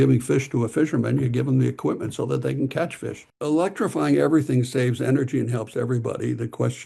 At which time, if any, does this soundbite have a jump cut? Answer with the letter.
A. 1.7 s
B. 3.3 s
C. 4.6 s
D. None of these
B